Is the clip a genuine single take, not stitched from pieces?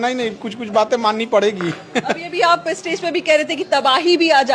yes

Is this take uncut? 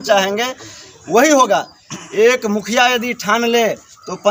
yes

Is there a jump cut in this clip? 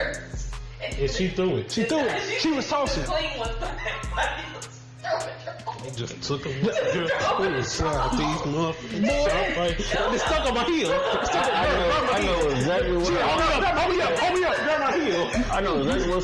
no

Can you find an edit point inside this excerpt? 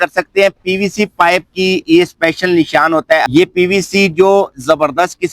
yes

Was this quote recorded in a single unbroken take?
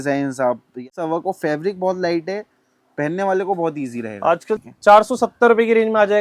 no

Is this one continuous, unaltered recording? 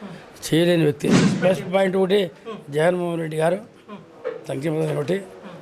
no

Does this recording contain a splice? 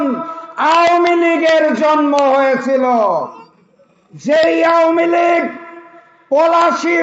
no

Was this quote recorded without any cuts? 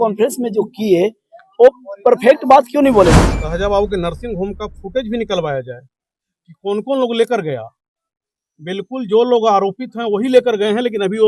no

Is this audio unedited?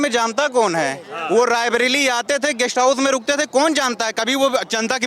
yes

